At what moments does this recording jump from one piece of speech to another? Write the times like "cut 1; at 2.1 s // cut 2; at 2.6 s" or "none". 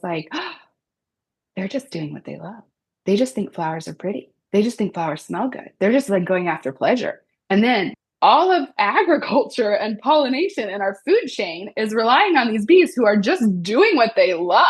cut 1; at 8.0 s